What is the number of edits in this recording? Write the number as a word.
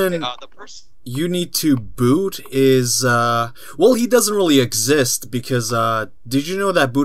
zero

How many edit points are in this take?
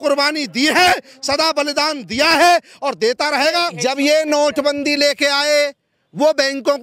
one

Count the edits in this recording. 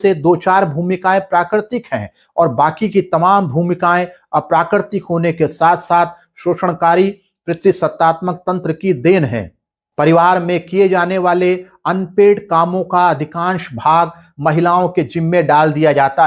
zero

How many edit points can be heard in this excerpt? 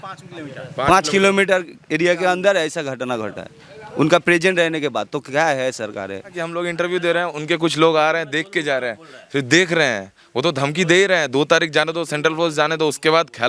one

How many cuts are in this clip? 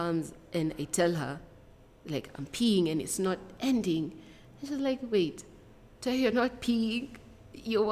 zero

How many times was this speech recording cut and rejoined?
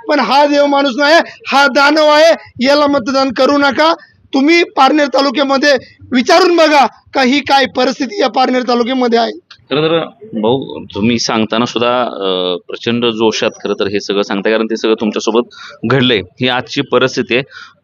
zero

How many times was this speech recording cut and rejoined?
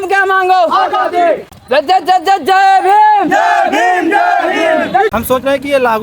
two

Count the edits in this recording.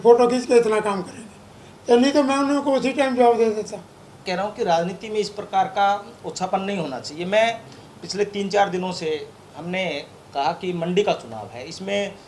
one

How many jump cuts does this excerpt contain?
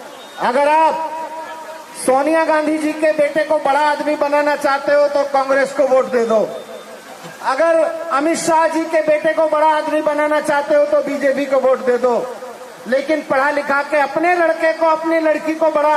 zero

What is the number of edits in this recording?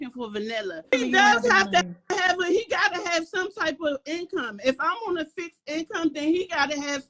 one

